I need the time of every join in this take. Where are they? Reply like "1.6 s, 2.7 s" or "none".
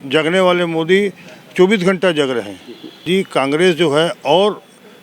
3.0 s

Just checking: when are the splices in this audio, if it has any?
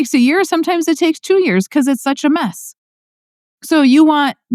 none

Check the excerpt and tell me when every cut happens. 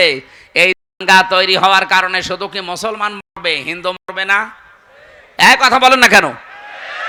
none

